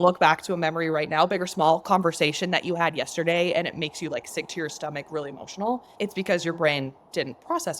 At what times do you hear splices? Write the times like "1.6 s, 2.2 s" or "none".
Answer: 5.9 s